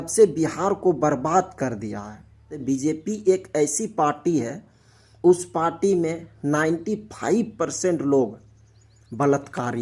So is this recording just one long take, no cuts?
no; 1 cut; at 2.5 s

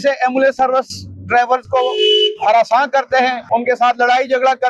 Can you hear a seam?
yes; 1 cut; at 3.4 s

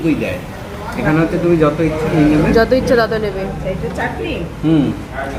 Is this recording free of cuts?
yes; 0 cuts

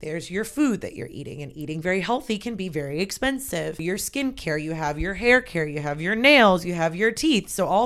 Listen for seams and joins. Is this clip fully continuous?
no; 1 cut; at 3.8 s

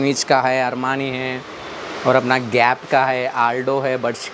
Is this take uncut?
yes; 0 cuts

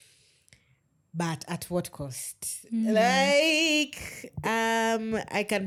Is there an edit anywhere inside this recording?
no; 0 cuts

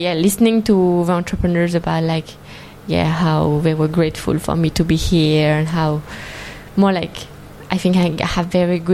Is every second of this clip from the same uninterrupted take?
yes; 0 cuts

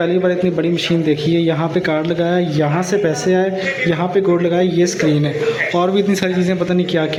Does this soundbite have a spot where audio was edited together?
no; 0 cuts

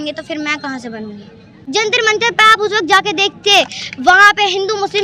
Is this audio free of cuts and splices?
no; 1 cut; at 1.6 s

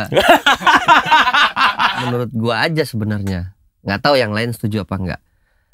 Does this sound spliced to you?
yes; 1 cut; at 2.0 s

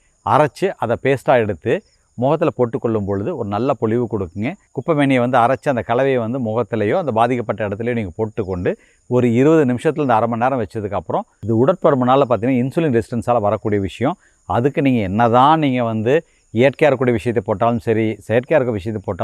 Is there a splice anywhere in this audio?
yes; 2 cuts; at 4.6 s, 11.4 s

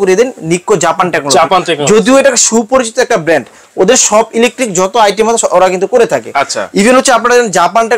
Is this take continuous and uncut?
yes; 0 cuts

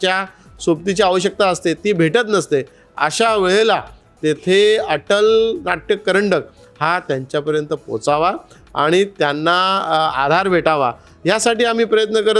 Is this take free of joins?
yes; 0 cuts

